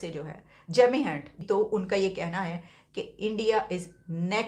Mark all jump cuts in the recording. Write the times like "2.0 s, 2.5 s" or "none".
1.3 s